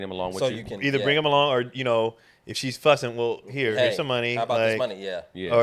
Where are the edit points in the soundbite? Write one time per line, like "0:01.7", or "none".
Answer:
none